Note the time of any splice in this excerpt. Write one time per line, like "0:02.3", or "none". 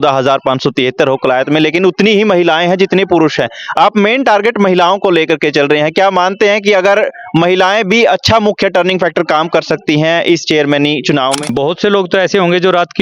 0:11.5